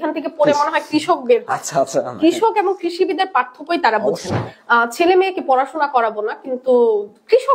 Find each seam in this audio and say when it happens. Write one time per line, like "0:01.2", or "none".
0:04.5